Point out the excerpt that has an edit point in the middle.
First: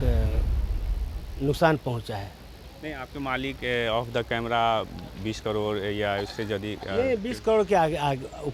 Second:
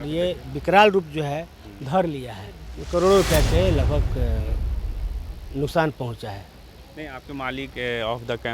second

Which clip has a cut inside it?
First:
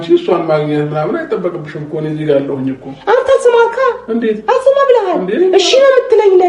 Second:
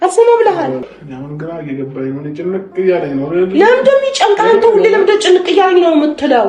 second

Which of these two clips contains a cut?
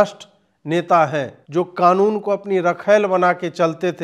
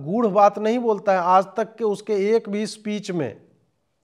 first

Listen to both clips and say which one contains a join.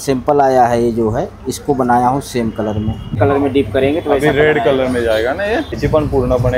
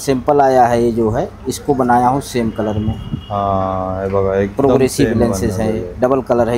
first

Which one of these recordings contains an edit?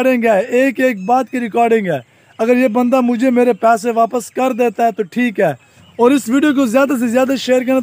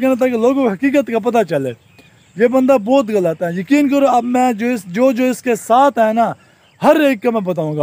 first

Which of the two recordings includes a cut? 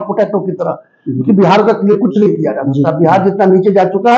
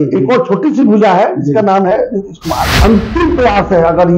second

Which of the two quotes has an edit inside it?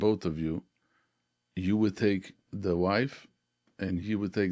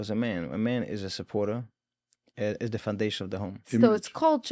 second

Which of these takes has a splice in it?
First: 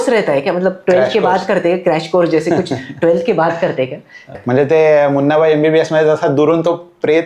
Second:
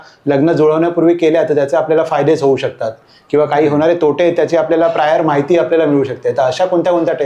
first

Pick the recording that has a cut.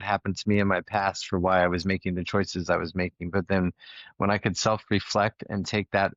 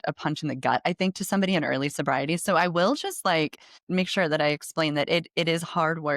second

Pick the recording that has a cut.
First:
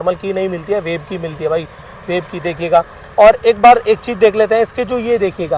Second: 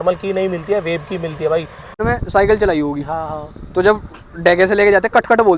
second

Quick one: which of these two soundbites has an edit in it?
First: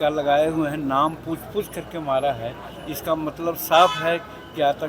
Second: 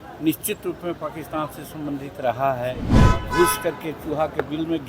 second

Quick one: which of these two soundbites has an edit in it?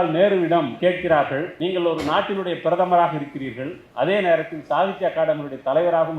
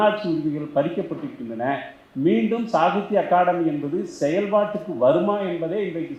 first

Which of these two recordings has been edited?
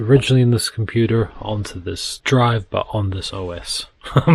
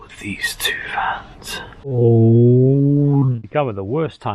second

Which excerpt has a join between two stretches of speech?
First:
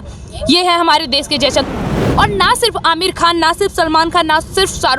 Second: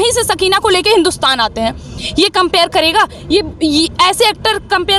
first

